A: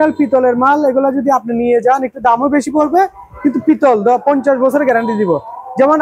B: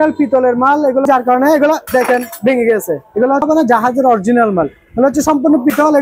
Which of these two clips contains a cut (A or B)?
B